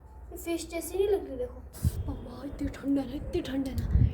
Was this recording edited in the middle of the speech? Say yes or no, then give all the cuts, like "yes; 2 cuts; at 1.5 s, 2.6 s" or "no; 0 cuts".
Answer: yes; 1 cut; at 2.0 s